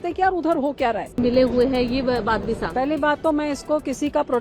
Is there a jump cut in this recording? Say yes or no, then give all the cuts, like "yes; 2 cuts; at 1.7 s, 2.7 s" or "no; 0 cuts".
yes; 1 cut; at 1.2 s